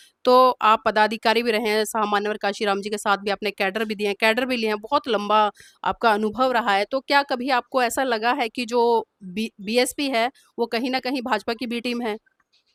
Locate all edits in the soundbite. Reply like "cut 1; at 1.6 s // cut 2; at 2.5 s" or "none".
none